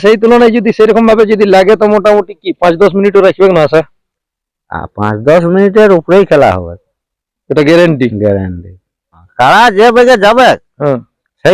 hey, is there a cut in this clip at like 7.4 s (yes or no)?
no